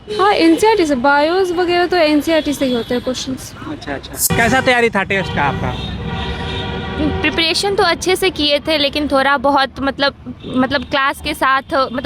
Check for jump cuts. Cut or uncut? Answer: cut